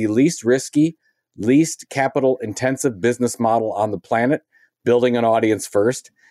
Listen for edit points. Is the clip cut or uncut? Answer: uncut